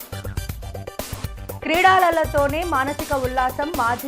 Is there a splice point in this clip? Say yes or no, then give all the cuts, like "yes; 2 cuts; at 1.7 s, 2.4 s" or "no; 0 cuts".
yes; 1 cut; at 1.2 s